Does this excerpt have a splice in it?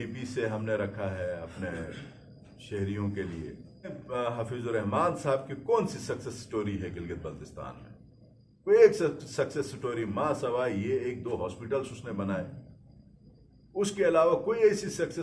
yes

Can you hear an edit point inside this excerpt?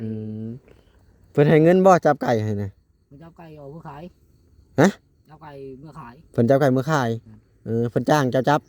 no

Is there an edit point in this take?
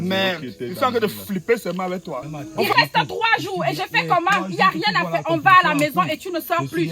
yes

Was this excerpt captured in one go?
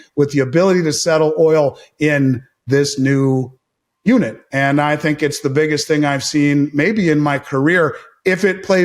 yes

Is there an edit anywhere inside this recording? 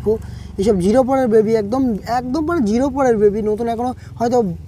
no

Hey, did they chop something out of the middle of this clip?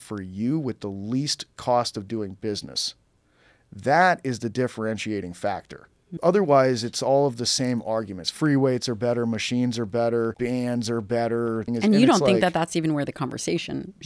yes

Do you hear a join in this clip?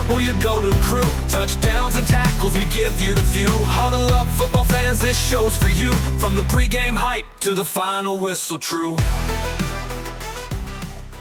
no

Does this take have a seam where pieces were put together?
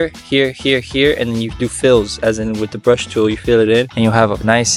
no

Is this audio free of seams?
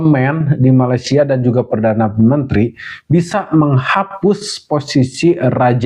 yes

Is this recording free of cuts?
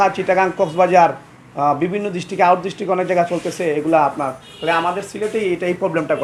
yes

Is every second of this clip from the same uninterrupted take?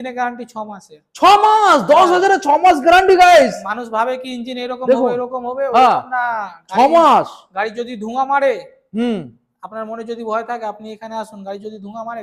yes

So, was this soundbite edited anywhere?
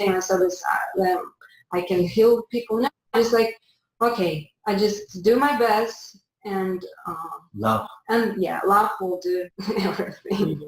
yes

